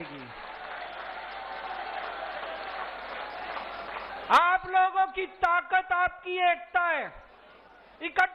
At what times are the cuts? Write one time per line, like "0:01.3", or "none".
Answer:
none